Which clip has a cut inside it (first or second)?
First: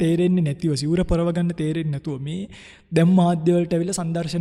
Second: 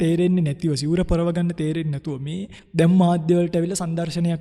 second